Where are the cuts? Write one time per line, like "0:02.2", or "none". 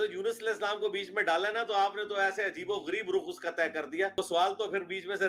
0:04.2